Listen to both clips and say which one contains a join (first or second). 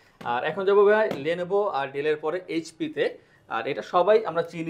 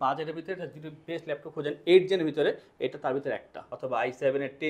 second